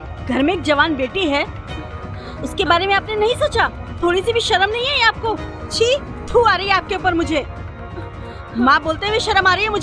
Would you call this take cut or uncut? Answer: cut